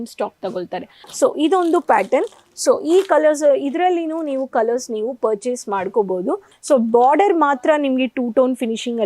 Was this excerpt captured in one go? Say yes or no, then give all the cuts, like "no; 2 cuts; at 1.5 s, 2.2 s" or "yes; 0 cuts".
no; 2 cuts; at 1.0 s, 6.5 s